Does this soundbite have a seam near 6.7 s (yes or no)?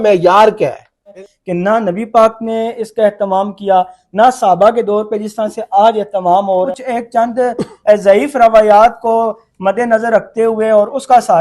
yes